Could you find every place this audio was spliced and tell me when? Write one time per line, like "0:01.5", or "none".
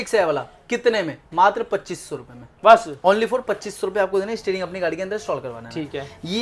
none